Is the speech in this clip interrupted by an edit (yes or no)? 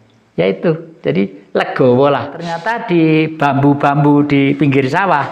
yes